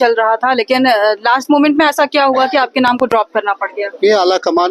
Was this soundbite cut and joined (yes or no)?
no